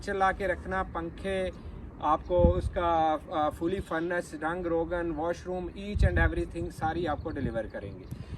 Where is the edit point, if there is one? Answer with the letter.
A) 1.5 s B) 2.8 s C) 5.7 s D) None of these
D